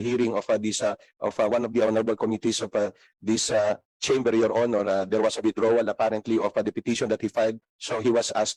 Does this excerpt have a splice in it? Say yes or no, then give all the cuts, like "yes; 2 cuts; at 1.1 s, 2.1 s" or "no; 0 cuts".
no; 0 cuts